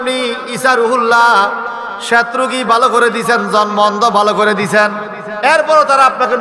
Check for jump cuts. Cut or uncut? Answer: uncut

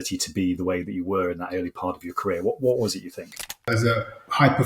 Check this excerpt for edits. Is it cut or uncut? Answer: cut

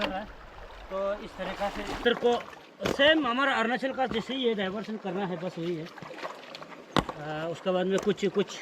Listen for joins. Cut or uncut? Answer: cut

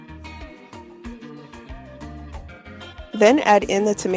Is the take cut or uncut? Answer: cut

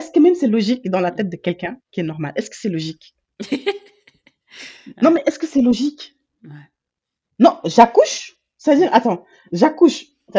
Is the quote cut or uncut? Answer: uncut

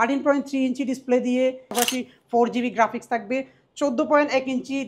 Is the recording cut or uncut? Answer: cut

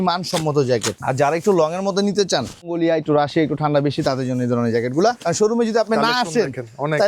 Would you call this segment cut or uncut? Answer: cut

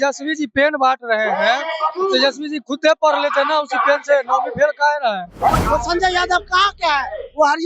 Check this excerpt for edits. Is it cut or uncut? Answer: cut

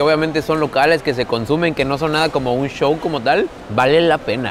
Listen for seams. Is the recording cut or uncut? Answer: cut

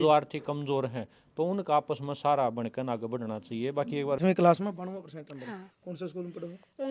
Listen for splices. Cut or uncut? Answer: cut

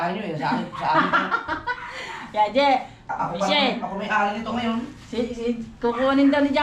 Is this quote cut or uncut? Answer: uncut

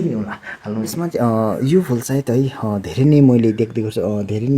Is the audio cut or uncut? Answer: cut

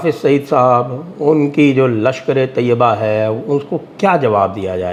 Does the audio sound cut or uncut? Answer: uncut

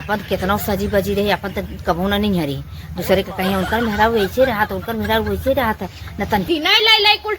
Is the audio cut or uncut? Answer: cut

